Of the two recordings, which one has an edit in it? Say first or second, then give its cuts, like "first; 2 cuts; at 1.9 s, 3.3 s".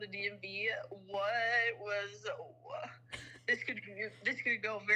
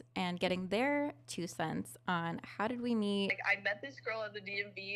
second; 1 cut; at 3.4 s